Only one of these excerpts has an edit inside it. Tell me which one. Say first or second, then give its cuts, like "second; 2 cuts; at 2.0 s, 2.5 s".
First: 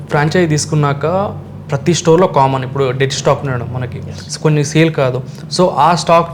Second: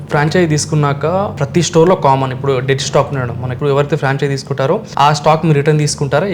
second; 3 cuts; at 1.4 s, 3.5 s, 4.9 s